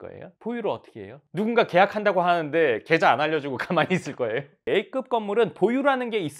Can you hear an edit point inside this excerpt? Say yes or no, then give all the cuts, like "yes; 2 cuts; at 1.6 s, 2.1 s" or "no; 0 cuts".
yes; 2 cuts; at 1.2 s, 4.7 s